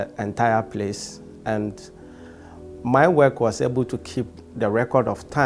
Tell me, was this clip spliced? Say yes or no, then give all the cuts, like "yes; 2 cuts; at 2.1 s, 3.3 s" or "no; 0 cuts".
no; 0 cuts